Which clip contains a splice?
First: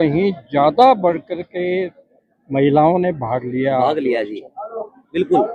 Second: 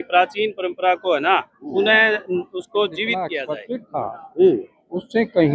second; 1 cut; at 3.3 s

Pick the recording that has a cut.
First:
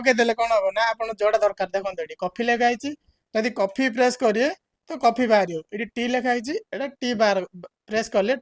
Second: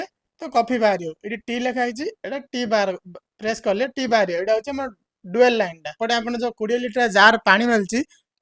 second; 1 cut; at 5.9 s

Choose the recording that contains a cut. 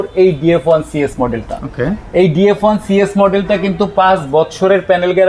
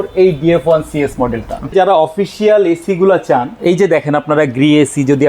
second; 2 cuts; at 1.7 s, 3.5 s

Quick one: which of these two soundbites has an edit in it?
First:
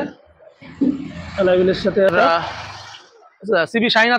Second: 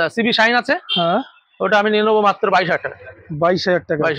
first; 1 cut; at 2.1 s

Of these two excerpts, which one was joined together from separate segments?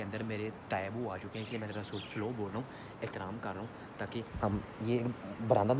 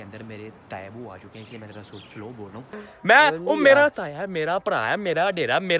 second; 1 cut; at 2.9 s

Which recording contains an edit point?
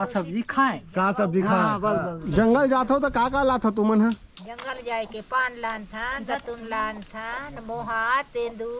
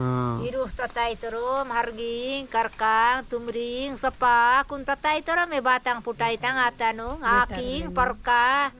first; 1 cut; at 2.2 s

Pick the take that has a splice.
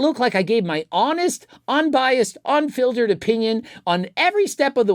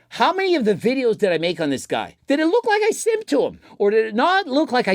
second; 2 cuts; at 2.1 s, 3.6 s

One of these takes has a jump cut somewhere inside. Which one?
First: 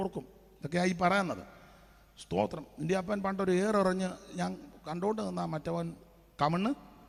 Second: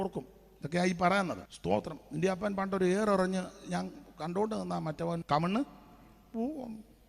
second; 2 cuts; at 1.5 s, 5.2 s

